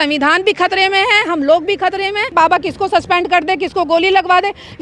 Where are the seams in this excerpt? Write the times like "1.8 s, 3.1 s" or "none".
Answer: 2.3 s